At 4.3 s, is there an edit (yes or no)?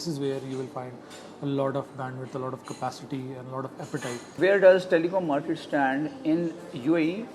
yes